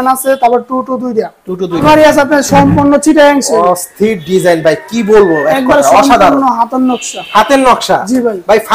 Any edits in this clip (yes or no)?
yes